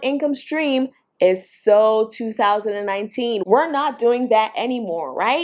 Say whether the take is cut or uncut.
uncut